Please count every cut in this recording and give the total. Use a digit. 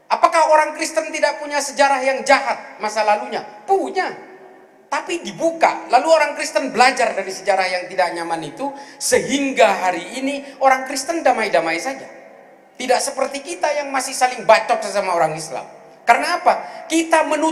0